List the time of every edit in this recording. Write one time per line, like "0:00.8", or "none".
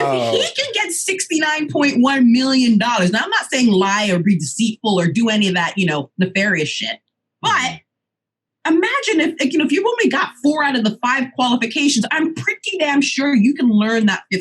none